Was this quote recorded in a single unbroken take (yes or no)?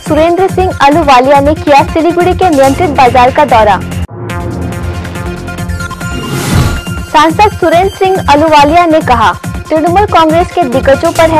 yes